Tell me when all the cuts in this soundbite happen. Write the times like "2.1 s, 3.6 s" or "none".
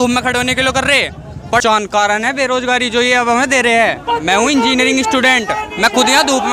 1.6 s